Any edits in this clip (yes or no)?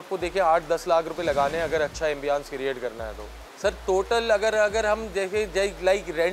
no